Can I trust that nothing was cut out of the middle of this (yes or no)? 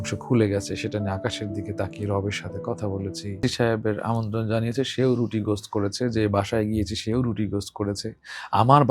no